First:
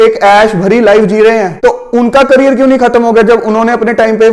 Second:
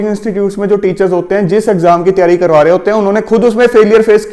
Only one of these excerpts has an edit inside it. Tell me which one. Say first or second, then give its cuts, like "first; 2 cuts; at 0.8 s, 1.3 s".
first; 1 cut; at 1.5 s